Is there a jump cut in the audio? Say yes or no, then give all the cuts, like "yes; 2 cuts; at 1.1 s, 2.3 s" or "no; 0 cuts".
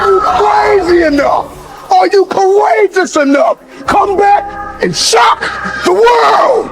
yes; 1 cut; at 3.7 s